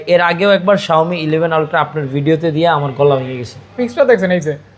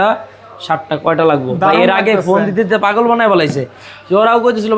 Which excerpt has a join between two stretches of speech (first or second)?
first